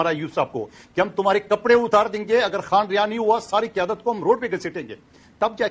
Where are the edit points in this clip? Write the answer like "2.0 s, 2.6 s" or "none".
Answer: none